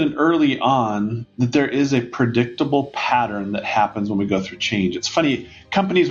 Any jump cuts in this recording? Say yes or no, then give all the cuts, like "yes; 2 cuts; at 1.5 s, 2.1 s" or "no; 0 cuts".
no; 0 cuts